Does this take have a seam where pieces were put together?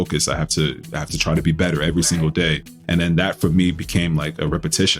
yes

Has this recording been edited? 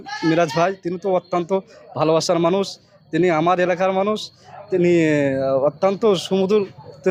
no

